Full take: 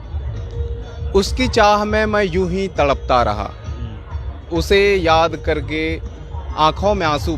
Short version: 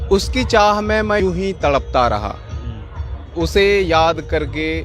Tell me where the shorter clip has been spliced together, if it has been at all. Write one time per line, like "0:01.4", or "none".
0:01.2